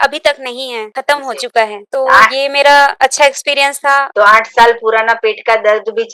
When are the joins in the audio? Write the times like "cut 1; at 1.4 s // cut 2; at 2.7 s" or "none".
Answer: cut 1; at 0.9 s // cut 2; at 1.8 s // cut 3; at 2.9 s // cut 4; at 4.1 s